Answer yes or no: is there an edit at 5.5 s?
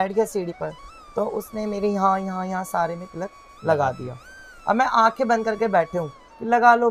no